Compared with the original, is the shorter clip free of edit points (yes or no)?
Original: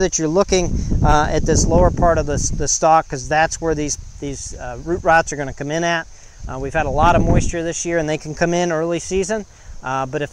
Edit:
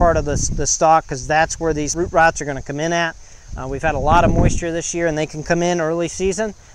no